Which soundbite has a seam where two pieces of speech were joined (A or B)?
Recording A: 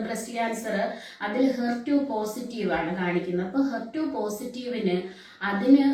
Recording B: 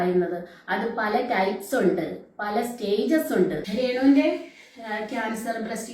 B